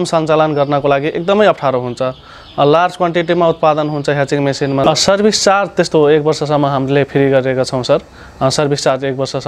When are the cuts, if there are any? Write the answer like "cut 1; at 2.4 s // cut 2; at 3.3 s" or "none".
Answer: cut 1; at 4.8 s